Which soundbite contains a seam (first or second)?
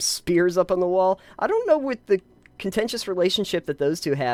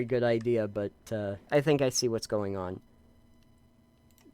second